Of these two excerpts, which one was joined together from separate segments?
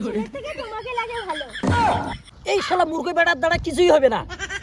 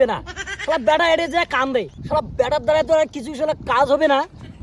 first; 1 cut; at 2.3 s

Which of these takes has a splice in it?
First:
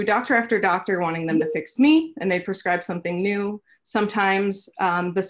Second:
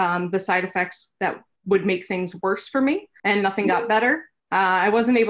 second; 3 cuts; at 1.5 s, 3.1 s, 4.3 s

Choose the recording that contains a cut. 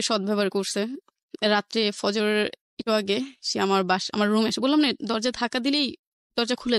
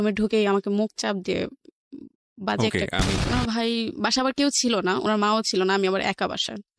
second; 1 cut; at 3.2 s

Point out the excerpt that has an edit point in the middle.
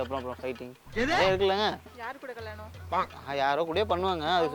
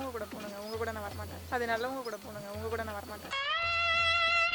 second; 1 cut; at 1.4 s

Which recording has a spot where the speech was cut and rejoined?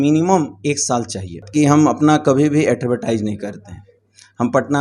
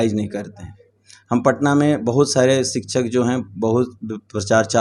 first; 1 cut; at 1.4 s

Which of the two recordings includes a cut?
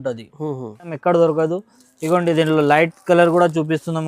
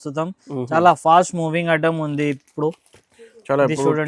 first; 1 cut; at 0.9 s

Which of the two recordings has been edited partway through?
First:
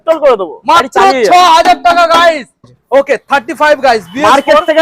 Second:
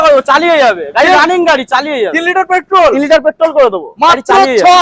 first; 1 cut; at 2.8 s

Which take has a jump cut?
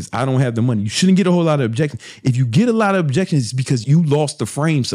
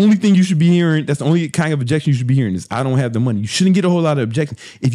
first; 1 cut; at 3.8 s

